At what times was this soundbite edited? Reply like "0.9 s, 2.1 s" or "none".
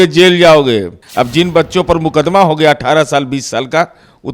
1.0 s